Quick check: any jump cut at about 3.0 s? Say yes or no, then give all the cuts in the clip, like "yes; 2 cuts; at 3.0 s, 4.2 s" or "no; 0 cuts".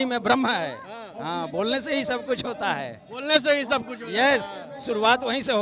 no; 0 cuts